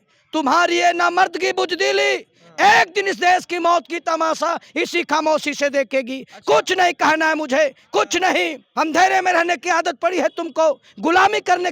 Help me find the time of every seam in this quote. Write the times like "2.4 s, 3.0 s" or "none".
8.6 s